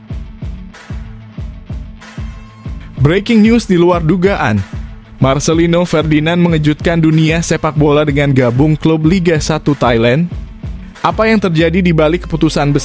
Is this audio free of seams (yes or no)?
yes